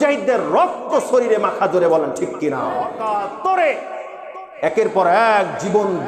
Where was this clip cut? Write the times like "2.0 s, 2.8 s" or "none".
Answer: 3.0 s